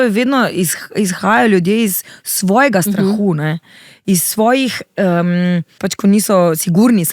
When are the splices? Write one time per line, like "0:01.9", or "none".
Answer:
0:05.9